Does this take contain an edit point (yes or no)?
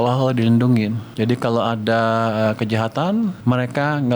yes